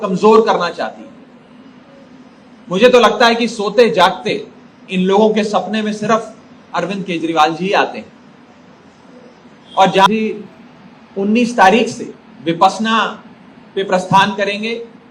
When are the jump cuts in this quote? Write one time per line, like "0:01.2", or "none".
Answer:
0:10.1